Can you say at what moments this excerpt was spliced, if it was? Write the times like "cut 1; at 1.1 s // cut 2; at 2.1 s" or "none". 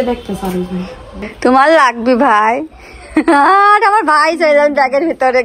cut 1; at 1.2 s